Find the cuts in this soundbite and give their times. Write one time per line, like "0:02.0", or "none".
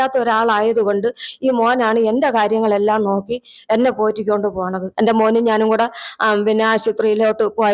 0:04.8